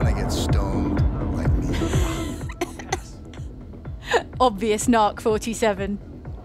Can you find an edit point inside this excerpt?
yes; 1 cut; at 4.3 s

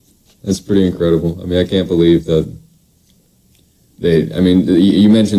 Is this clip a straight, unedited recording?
yes; 0 cuts

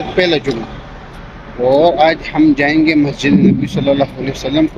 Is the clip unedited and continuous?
yes; 0 cuts

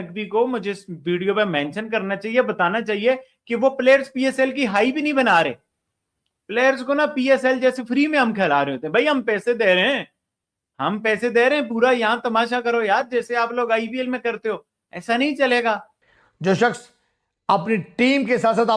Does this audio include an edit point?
yes; 1 cut; at 15.9 s

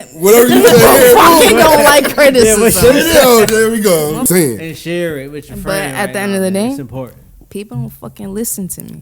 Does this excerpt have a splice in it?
yes; 1 cut; at 4.2 s

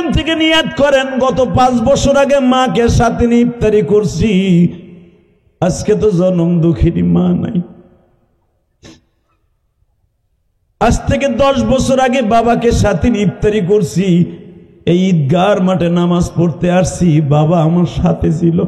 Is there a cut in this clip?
no; 0 cuts

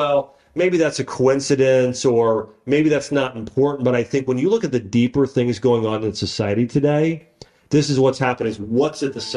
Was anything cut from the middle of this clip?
no; 0 cuts

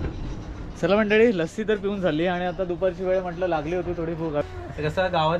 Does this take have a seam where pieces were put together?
yes; 1 cut; at 4.4 s

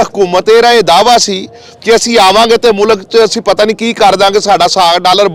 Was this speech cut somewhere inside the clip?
no; 0 cuts

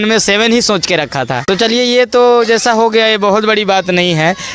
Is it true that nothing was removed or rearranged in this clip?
yes; 0 cuts

